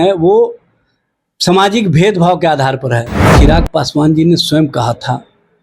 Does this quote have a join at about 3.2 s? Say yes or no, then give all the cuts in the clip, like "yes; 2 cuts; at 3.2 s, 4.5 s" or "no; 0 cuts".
yes; 1 cut; at 3.2 s